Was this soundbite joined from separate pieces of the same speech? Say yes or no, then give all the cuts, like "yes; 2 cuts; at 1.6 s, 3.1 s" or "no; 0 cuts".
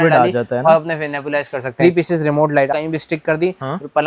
yes; 2 cuts; at 1.6 s, 2.7 s